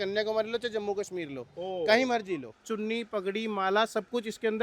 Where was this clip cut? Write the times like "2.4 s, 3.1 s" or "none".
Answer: 2.6 s